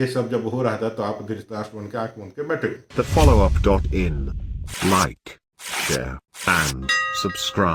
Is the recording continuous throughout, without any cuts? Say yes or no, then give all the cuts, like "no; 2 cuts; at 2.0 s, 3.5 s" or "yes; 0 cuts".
yes; 0 cuts